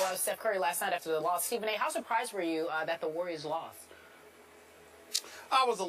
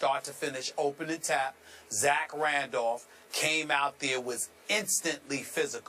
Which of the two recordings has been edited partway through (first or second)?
first